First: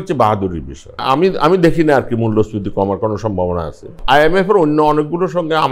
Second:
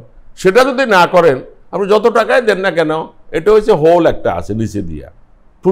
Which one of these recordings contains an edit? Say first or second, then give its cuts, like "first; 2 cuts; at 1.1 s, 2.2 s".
first; 2 cuts; at 1.0 s, 4.0 s